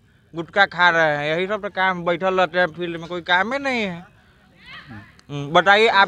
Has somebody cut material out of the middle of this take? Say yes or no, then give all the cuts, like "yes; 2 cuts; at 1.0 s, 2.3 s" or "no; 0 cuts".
no; 0 cuts